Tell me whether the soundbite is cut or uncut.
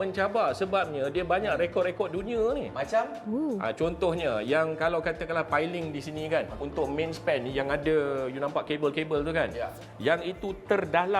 uncut